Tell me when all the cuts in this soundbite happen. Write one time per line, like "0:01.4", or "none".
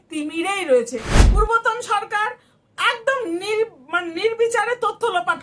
0:01.2